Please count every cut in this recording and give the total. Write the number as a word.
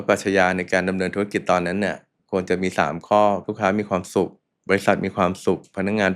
three